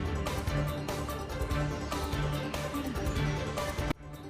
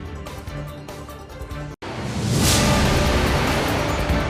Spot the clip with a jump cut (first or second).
first